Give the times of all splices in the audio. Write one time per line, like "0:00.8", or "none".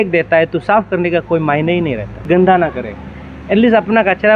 0:02.3